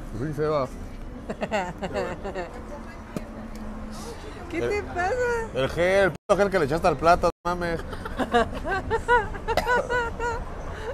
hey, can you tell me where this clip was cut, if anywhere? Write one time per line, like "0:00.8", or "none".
none